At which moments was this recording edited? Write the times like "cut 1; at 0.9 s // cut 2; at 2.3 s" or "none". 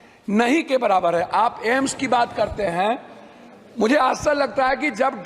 none